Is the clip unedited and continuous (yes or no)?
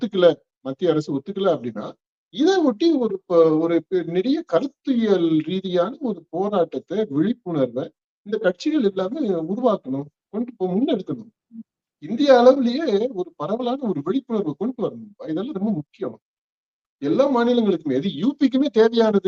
yes